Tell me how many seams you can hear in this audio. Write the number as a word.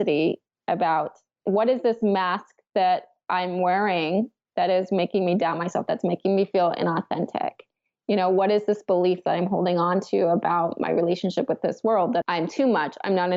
one